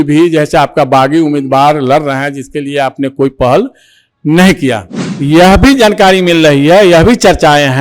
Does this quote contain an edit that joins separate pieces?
yes; 1 cut; at 5.1 s

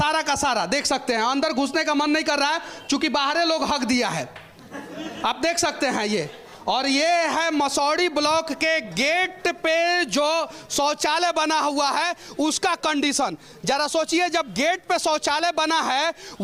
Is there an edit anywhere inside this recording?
no; 0 cuts

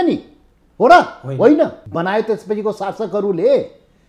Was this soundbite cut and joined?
yes; 1 cut; at 1.8 s

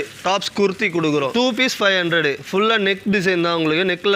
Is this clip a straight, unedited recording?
no; 1 cut; at 1.3 s

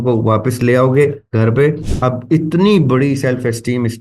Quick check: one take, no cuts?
no; 1 cut; at 1.9 s

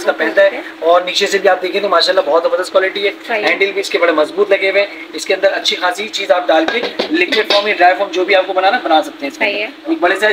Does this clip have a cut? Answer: no; 0 cuts

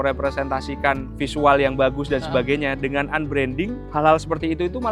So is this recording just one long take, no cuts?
no; 2 cuts; at 1.1 s, 3.8 s

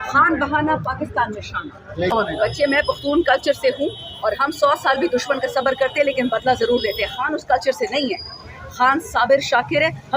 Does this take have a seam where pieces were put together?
yes; 1 cut; at 2.1 s

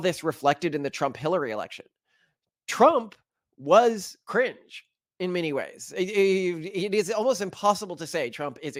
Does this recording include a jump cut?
no; 0 cuts

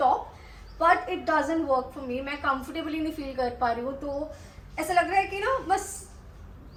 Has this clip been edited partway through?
no; 0 cuts

